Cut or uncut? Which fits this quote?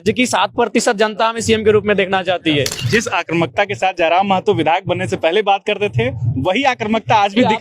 cut